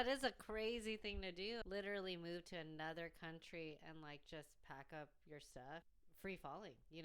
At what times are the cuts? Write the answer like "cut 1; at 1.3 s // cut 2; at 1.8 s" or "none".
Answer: cut 1; at 1.6 s // cut 2; at 5.9 s